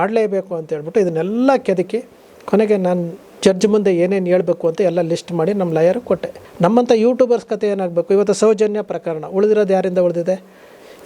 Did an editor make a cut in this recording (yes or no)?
yes